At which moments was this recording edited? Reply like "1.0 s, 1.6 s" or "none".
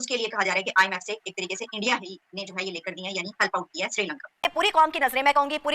4.4 s